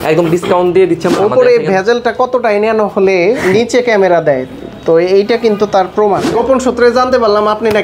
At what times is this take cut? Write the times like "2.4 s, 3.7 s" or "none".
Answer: 1.1 s, 6.3 s